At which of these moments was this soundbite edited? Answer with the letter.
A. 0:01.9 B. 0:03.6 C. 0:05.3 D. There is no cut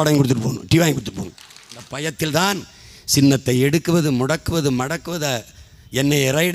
A